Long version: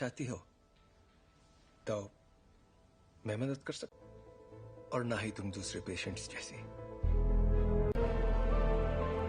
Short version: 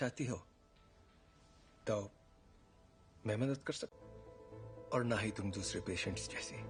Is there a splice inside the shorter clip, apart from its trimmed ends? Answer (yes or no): no